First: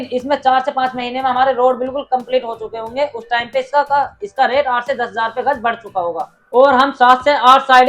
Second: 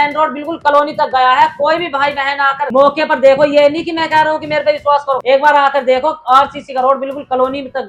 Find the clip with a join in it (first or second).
first